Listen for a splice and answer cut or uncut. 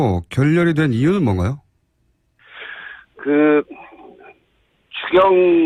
uncut